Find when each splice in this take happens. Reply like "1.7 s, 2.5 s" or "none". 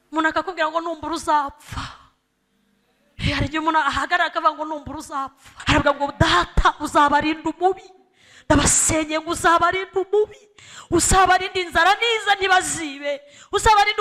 5.4 s